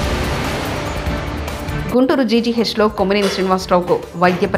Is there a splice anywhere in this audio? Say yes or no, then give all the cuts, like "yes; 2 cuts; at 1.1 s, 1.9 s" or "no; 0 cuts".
no; 0 cuts